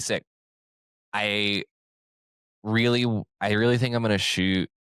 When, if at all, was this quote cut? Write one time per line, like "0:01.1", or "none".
none